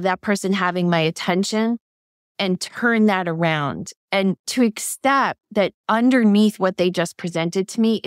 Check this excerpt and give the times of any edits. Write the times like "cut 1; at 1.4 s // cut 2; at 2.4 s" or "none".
cut 1; at 4.5 s

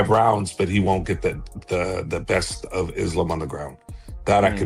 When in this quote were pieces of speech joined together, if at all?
cut 1; at 2.6 s

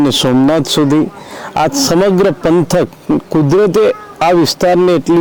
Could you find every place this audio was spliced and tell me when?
none

